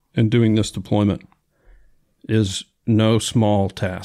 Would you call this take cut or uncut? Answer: uncut